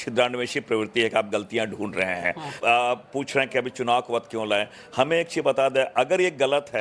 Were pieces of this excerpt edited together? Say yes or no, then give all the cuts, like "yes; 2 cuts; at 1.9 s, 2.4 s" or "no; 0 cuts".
no; 0 cuts